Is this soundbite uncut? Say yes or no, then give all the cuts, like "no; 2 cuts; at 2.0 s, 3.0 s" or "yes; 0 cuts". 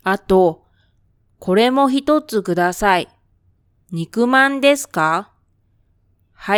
yes; 0 cuts